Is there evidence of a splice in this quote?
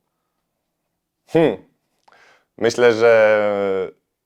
no; 0 cuts

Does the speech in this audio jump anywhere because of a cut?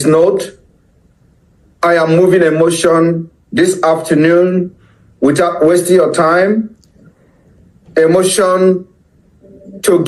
no; 0 cuts

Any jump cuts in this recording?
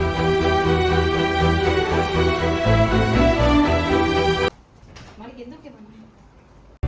yes; 1 cut; at 4.5 s

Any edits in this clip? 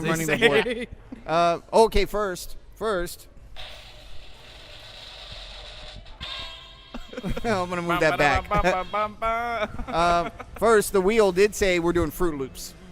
yes; 1 cut; at 9.4 s

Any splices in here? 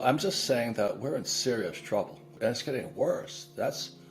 yes; 1 cut; at 2.3 s

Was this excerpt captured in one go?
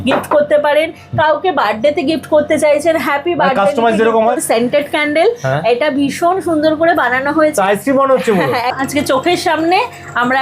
no; 2 cuts; at 4.4 s, 8.7 s

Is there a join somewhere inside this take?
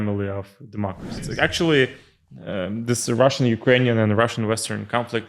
yes; 1 cut; at 1.3 s

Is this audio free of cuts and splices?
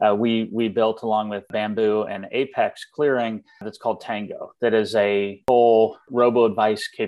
no; 4 cuts; at 1.5 s, 3.7 s, 5.4 s, 6.0 s

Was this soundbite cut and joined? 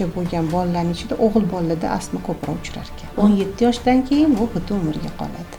yes; 1 cut; at 3.1 s

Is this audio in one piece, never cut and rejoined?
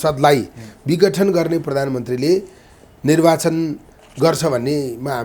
yes; 0 cuts

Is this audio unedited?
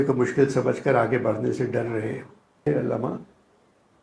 no; 1 cut; at 2.9 s

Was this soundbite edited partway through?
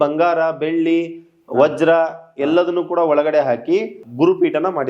yes; 1 cut; at 4.0 s

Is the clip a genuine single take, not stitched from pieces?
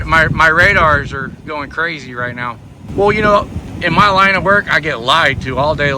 no; 1 cut; at 2.8 s

